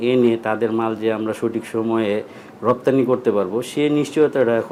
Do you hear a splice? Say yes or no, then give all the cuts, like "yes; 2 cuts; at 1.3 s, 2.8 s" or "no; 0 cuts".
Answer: no; 0 cuts